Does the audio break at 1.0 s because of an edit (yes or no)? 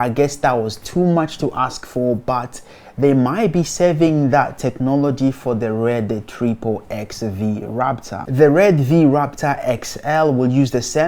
no